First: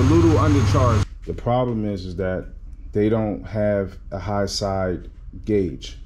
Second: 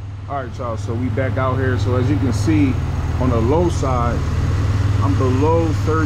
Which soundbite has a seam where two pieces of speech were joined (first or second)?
first